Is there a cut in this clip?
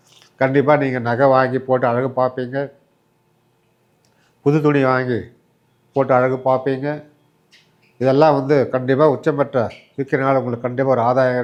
no; 0 cuts

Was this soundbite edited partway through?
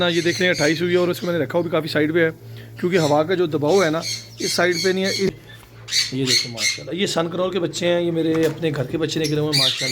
yes; 1 cut; at 5.3 s

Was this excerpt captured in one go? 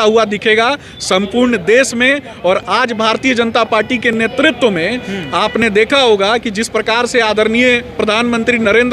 yes; 0 cuts

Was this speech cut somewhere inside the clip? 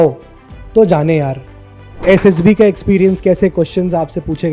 yes; 1 cut; at 2.0 s

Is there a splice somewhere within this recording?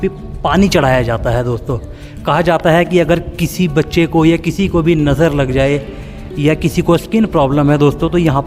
no; 0 cuts

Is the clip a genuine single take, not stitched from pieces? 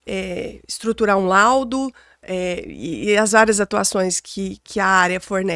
yes; 0 cuts

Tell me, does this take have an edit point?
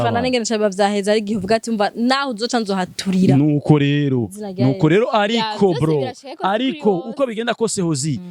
no; 0 cuts

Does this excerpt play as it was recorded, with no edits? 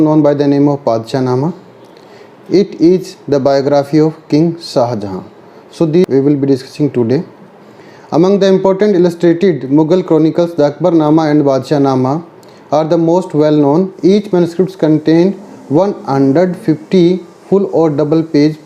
no; 1 cut; at 6.1 s

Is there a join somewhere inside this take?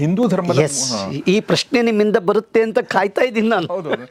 no; 0 cuts

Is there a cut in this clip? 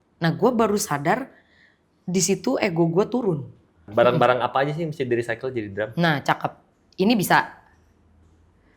yes; 1 cut; at 3.9 s

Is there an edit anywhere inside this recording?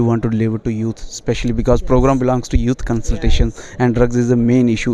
no; 0 cuts

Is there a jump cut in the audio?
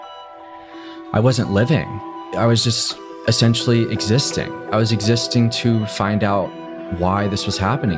no; 0 cuts

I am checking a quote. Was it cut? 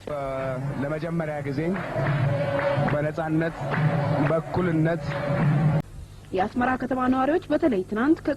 yes; 1 cut; at 5.8 s

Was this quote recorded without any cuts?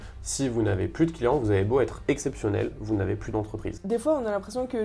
no; 1 cut; at 3.8 s

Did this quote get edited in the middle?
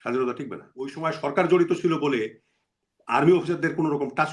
yes; 1 cut; at 1.0 s

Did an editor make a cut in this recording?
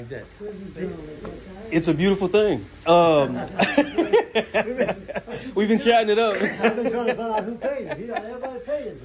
no; 0 cuts

